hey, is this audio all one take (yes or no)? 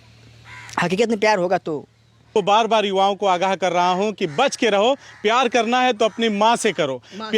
no